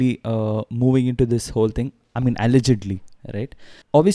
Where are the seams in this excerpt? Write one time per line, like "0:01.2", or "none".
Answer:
none